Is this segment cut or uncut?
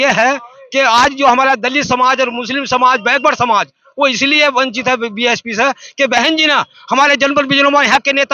uncut